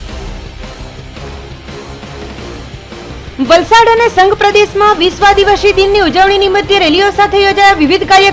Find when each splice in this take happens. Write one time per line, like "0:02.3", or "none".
0:03.2